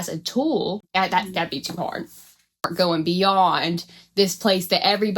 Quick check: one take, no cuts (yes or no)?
no